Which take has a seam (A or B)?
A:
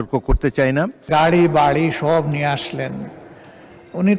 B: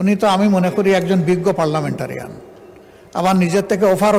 A